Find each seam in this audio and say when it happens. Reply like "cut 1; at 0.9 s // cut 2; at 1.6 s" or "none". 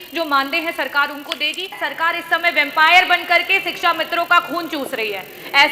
cut 1; at 1.8 s